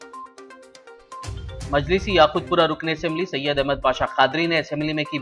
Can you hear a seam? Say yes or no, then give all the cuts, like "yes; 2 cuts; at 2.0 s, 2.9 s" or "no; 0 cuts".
no; 0 cuts